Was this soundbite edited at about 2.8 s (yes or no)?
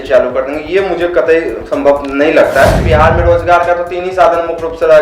yes